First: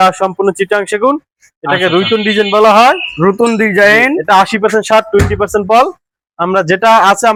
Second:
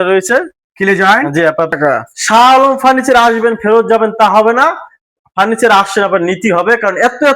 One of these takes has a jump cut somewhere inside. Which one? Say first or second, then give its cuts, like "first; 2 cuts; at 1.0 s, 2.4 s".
second; 1 cut; at 1.7 s